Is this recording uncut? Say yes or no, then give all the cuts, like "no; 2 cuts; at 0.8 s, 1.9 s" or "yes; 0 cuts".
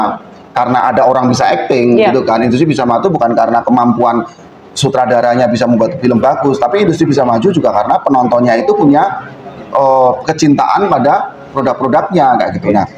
yes; 0 cuts